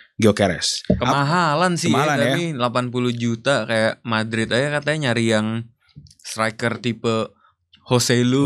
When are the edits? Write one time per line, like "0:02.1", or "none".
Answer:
none

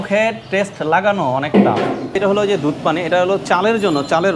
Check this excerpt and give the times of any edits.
0:02.2
0:03.4

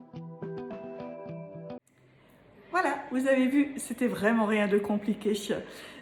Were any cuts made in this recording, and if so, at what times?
0:01.8

